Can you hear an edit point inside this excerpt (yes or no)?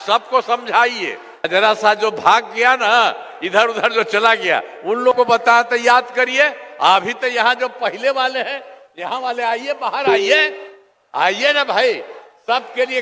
yes